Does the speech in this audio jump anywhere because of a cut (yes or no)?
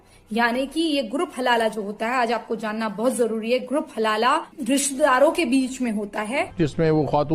yes